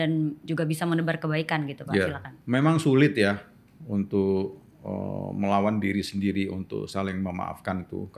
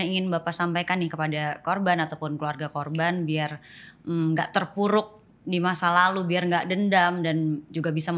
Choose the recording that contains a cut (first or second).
first